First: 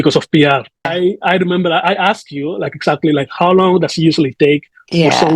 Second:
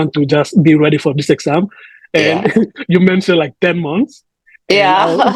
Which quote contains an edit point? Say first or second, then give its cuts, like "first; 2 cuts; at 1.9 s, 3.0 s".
first; 1 cut; at 0.9 s